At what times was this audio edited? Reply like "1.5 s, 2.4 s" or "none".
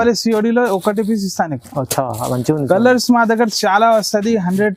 none